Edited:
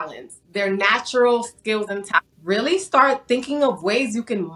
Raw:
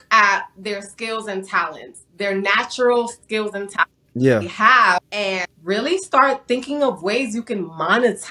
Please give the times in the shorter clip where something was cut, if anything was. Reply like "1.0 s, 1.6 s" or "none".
2.3 s